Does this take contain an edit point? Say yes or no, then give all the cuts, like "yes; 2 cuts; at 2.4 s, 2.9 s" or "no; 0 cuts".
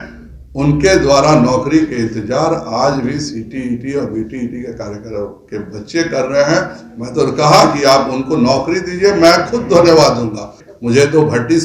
yes; 1 cut; at 10.6 s